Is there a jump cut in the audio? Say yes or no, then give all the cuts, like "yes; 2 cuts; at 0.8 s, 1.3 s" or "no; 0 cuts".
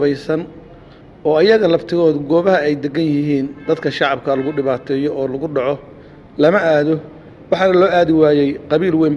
no; 0 cuts